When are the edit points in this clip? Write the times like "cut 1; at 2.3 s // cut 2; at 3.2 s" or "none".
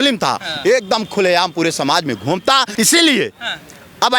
cut 1; at 2.7 s